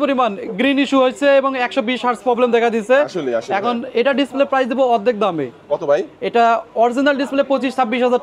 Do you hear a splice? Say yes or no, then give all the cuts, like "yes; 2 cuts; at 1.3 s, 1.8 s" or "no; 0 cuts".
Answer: no; 0 cuts